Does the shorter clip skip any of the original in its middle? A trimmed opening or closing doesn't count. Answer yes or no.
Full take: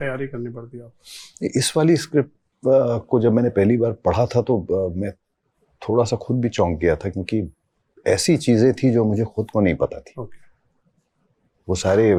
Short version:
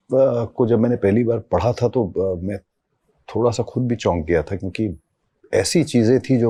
no